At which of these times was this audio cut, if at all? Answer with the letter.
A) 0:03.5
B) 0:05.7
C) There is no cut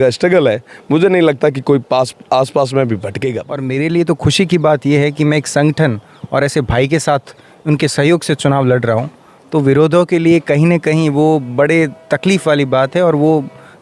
A